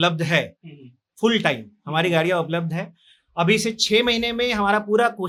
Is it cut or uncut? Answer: uncut